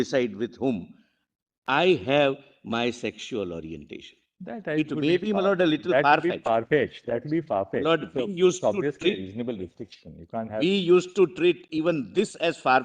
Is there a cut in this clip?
no; 0 cuts

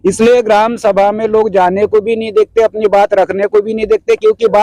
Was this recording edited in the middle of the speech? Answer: no; 0 cuts

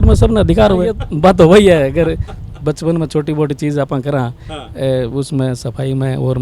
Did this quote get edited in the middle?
yes; 1 cut; at 0.9 s

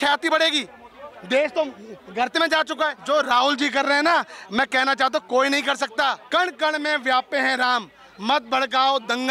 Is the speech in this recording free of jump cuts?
no; 2 cuts; at 3.0 s, 6.2 s

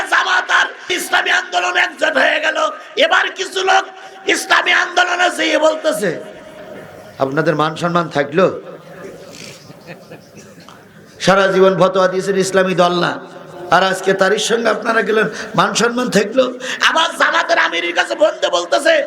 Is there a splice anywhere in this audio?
yes; 1 cut; at 0.9 s

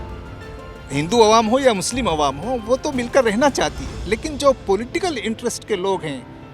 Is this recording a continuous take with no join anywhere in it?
yes; 0 cuts

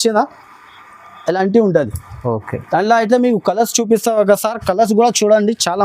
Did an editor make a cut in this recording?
no; 0 cuts

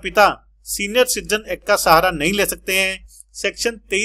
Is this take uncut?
yes; 0 cuts

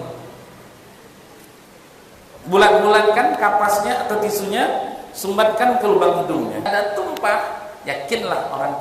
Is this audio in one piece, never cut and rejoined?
no; 1 cut; at 6.7 s

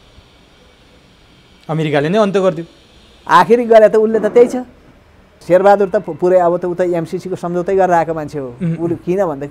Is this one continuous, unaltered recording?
no; 1 cut; at 5.4 s

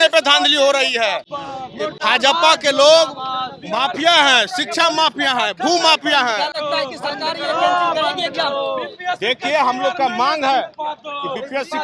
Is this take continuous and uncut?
yes; 0 cuts

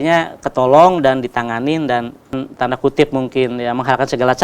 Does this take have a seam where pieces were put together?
yes; 1 cut; at 2.4 s

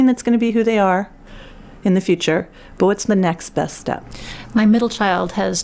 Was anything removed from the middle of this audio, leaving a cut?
no; 0 cuts

